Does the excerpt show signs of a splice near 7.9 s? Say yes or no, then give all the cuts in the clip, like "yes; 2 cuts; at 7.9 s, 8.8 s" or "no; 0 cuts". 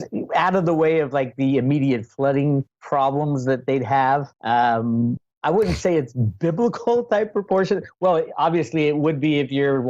no; 1 cut; at 4.0 s